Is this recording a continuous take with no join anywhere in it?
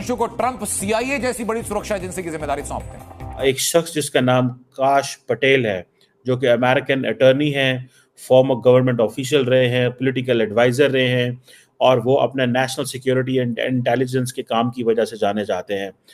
no; 1 cut; at 3.4 s

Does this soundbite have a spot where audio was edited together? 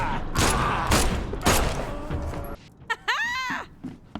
yes; 1 cut; at 2.5 s

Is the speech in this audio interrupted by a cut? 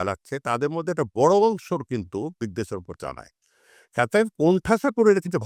no; 0 cuts

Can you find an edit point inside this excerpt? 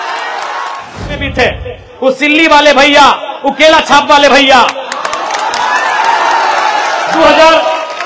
yes; 1 cut; at 1.2 s

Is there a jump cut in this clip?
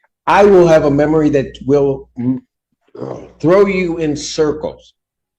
no; 0 cuts

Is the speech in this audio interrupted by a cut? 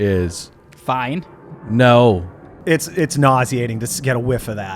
yes; 1 cut; at 2.6 s

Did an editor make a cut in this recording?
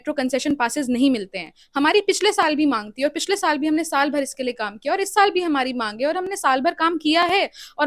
no; 0 cuts

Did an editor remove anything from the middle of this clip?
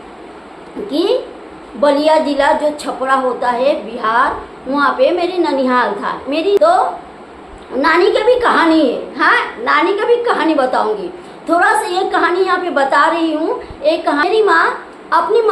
yes; 2 cuts; at 6.6 s, 14.2 s

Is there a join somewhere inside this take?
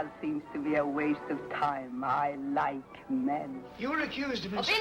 yes; 1 cut; at 3.6 s

